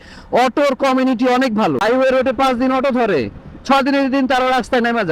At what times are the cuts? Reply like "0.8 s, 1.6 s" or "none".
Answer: 1.8 s